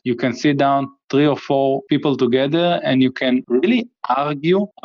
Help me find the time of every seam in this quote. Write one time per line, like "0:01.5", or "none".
0:01.8
0:03.4